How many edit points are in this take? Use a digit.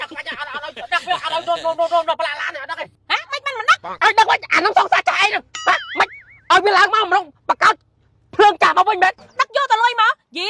2